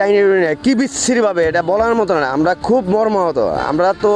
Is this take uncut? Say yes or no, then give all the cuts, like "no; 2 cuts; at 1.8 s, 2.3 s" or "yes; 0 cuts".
yes; 0 cuts